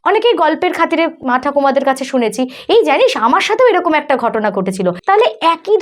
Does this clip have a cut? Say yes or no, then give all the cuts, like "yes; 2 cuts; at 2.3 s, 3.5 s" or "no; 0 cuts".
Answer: yes; 2 cuts; at 1.2 s, 5.0 s